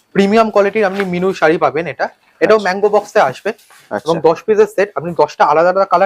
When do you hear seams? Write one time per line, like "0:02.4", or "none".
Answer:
none